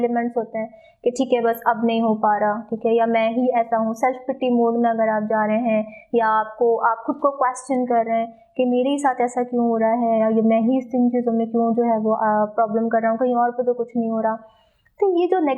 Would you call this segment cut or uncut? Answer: uncut